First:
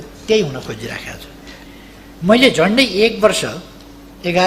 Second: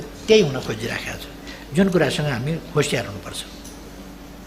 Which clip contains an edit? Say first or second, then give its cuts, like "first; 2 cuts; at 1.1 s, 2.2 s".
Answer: first; 1 cut; at 1.7 s